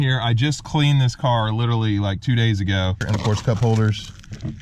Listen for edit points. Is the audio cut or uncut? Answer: cut